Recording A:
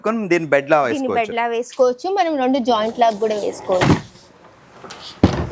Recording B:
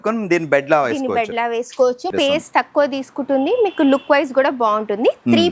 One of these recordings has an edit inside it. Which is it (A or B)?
B